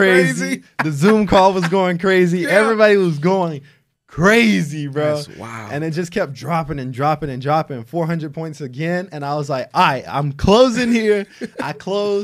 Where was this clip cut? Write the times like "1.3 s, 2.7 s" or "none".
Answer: none